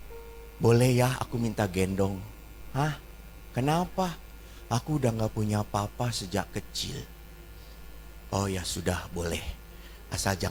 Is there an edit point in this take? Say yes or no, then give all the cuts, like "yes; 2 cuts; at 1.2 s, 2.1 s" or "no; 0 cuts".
no; 0 cuts